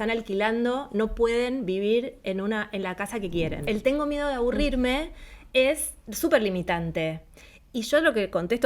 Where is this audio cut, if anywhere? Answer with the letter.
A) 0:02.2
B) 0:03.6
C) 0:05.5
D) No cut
B